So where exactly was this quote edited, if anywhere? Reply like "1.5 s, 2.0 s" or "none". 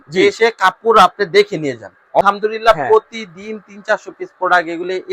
2.2 s